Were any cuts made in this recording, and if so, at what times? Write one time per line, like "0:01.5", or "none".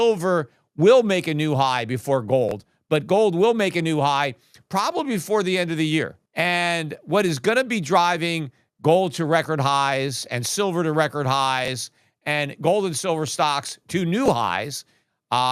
0:06.2